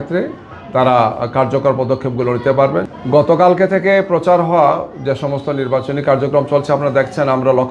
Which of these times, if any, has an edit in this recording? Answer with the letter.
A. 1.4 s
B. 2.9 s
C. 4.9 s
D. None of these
B